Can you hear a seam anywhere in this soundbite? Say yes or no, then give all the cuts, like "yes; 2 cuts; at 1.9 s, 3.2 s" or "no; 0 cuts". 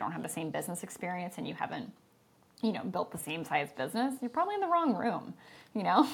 no; 0 cuts